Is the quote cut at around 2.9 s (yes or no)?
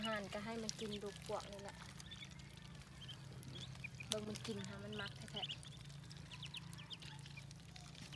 no